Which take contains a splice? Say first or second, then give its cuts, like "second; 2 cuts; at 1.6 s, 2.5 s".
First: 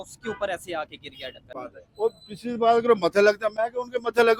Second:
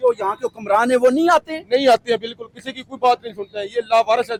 first; 1 cut; at 1.5 s